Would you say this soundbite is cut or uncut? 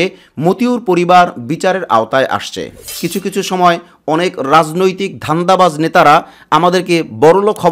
cut